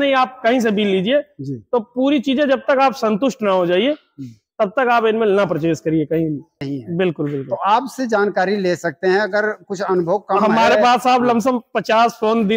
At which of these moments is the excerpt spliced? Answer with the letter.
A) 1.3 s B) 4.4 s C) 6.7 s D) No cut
C